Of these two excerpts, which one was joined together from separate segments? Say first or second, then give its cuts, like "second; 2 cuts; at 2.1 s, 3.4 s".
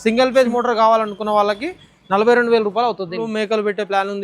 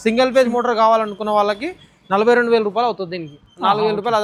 first; 1 cut; at 3.3 s